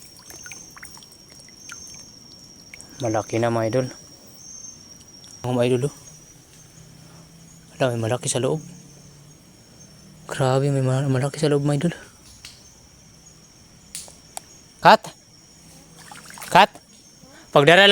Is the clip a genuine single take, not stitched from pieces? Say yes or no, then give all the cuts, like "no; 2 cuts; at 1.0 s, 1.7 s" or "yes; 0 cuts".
no; 1 cut; at 5.4 s